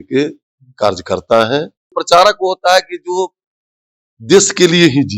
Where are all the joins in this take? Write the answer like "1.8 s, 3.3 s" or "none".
2.0 s